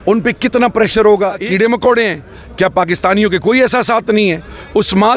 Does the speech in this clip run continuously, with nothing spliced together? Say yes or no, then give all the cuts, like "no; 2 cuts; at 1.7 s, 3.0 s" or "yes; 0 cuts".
no; 1 cut; at 1.4 s